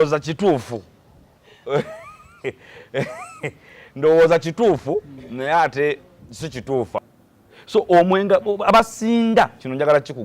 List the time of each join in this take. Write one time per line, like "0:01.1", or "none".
0:07.0